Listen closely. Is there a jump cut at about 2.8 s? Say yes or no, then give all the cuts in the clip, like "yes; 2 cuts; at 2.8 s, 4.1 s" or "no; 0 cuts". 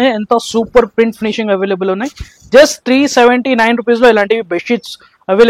no; 0 cuts